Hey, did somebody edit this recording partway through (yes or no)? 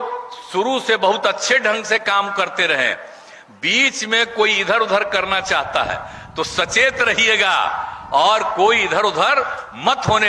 no